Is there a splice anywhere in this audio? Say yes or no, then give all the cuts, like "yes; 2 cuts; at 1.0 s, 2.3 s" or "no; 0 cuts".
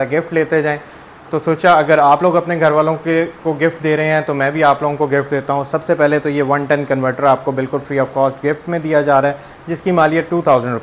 no; 0 cuts